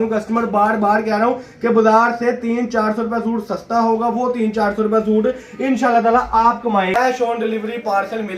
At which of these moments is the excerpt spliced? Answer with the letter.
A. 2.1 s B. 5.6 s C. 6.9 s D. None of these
C